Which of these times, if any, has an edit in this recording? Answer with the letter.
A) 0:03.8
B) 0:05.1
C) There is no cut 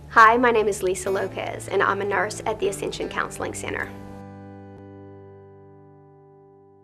A